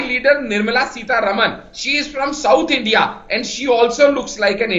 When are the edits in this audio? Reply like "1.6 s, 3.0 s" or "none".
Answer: none